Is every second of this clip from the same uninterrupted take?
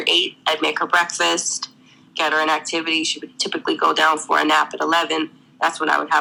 yes; 0 cuts

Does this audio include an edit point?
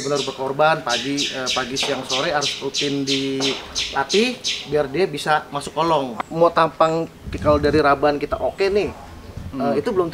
yes; 1 cut; at 6.2 s

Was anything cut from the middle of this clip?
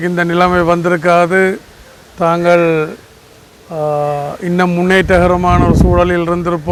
no; 0 cuts

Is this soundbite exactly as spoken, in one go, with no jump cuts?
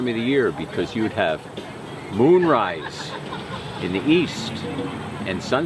yes; 0 cuts

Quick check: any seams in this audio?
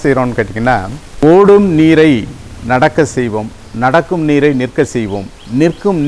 yes; 1 cut; at 1.0 s

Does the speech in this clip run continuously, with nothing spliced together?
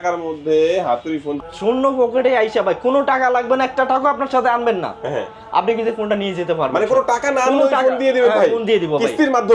no; 1 cut; at 1.3 s

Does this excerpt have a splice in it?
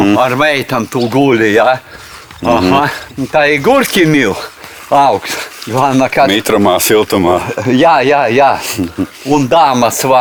no; 0 cuts

